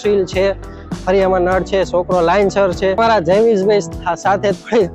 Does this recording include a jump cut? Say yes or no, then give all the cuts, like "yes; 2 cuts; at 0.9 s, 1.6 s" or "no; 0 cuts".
yes; 1 cut; at 3.0 s